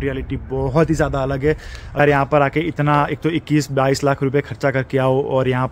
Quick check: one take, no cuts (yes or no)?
no